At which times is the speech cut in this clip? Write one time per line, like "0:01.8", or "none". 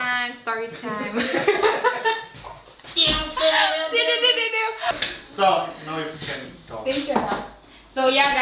0:05.0